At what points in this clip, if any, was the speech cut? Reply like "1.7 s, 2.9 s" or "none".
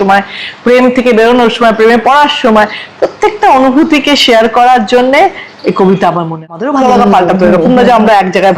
6.5 s